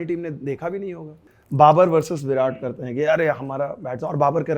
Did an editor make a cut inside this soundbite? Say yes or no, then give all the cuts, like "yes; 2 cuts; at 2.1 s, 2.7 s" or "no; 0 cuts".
yes; 1 cut; at 1.3 s